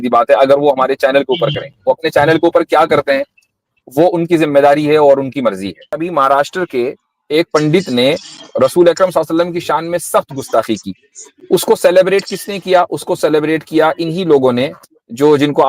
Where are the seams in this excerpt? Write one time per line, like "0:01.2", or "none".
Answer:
0:06.0